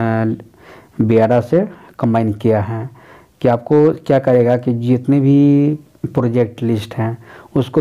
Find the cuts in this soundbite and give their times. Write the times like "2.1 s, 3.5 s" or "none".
none